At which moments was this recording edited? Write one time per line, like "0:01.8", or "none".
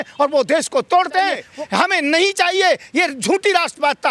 0:01.5